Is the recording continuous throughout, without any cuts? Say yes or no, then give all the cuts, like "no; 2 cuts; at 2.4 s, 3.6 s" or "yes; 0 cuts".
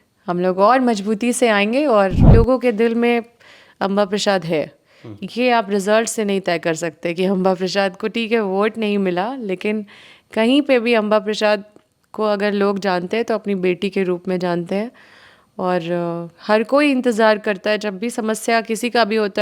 no; 1 cut; at 2.2 s